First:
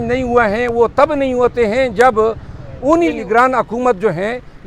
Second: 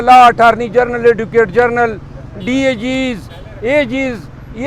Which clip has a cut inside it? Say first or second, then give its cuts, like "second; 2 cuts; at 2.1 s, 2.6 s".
first; 1 cut; at 3.2 s